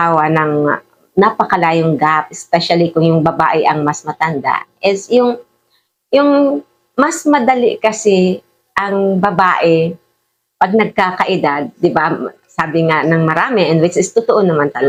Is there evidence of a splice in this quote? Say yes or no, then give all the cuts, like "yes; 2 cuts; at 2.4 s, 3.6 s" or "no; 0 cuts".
no; 0 cuts